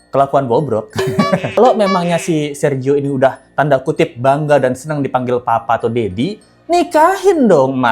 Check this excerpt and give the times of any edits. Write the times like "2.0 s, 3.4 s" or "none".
1.6 s